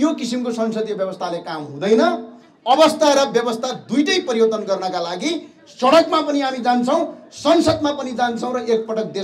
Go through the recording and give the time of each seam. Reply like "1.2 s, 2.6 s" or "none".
none